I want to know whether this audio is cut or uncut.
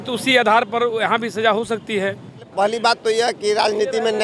cut